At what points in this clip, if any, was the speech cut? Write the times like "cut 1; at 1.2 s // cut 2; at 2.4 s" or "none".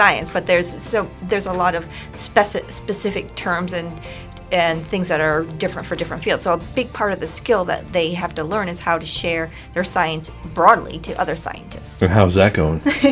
cut 1; at 11.9 s